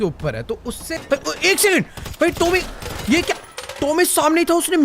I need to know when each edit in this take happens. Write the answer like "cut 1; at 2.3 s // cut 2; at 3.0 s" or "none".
cut 1; at 0.9 s